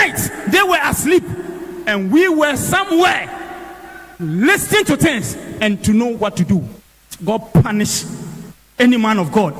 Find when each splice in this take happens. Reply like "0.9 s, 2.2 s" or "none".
none